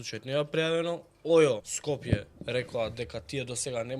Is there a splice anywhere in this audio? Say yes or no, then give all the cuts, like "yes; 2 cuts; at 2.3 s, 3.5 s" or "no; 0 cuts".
yes; 1 cut; at 1.7 s